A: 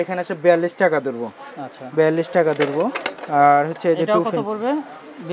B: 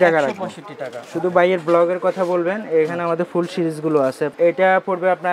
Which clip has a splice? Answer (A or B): B